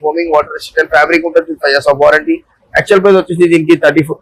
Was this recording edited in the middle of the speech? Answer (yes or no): no